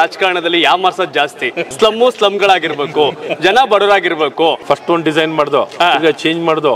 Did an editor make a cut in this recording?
yes; 2 cuts; at 1.7 s, 4.6 s

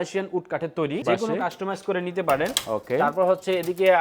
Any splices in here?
yes; 1 cut; at 1.0 s

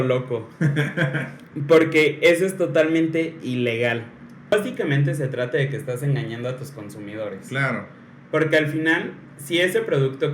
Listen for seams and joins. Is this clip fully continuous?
no; 1 cut; at 4.5 s

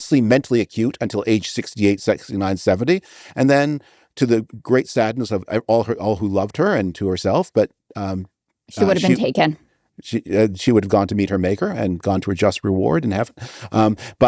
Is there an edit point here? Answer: no; 0 cuts

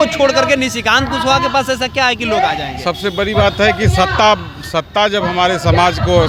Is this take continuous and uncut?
yes; 0 cuts

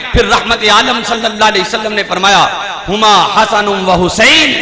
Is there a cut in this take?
no; 0 cuts

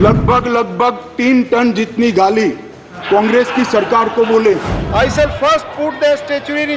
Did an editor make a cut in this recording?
yes; 1 cut; at 4.7 s

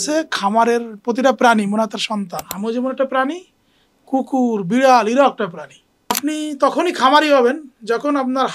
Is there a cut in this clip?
yes; 2 cuts; at 2.4 s, 6.2 s

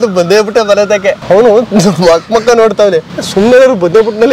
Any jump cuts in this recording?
yes; 2 cuts; at 1.2 s, 3.2 s

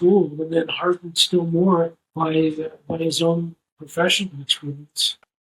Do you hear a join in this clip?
yes; 1 cut; at 2.0 s

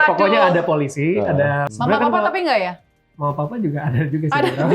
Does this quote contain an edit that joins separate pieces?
yes; 1 cut; at 1.7 s

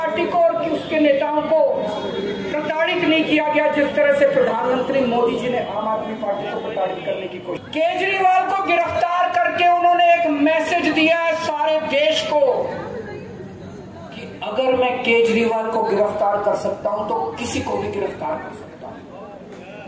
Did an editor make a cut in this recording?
yes; 1 cut; at 7.6 s

